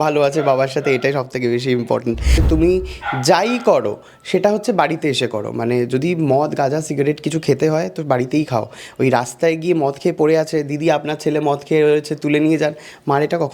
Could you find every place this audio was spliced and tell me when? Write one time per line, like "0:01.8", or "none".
0:02.4